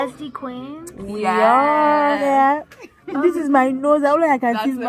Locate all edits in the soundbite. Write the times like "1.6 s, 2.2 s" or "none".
2.2 s